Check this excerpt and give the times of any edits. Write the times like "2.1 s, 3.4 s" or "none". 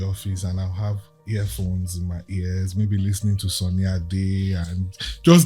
1.1 s